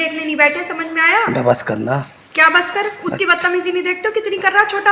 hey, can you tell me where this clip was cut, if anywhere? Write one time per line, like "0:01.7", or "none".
none